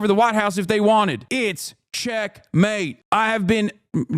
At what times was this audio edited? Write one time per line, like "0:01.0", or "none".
0:02.9